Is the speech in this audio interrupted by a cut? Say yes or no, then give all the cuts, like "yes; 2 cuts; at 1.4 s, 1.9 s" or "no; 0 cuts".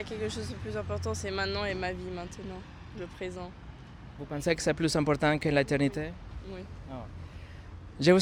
no; 0 cuts